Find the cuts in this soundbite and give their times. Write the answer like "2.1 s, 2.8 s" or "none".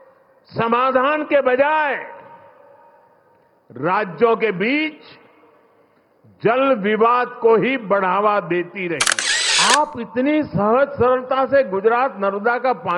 9.2 s